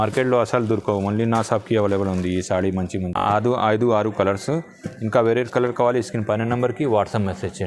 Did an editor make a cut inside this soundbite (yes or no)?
yes